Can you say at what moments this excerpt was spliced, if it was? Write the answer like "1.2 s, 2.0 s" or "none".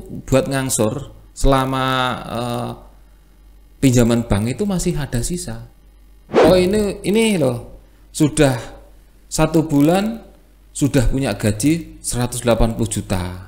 6.4 s